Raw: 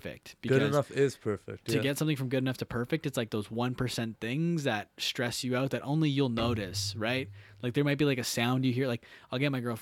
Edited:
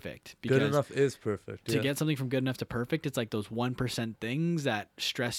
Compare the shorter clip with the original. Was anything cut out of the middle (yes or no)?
no